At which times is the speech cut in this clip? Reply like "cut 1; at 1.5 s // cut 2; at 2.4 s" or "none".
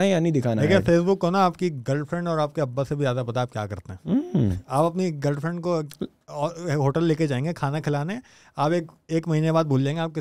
none